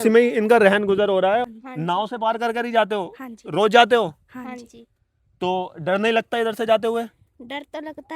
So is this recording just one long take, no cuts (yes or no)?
no